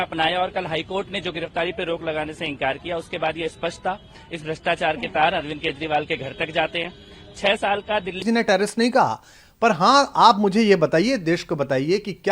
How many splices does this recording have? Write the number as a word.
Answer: one